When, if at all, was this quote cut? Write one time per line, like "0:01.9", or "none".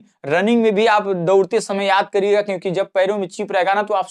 none